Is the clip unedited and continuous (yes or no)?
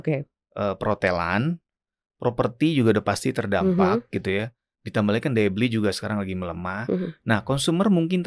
yes